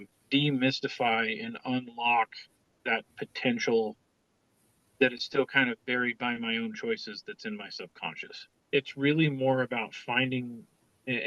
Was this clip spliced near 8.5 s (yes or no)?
yes